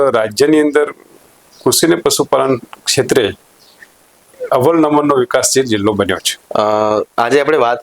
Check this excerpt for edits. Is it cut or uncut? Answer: uncut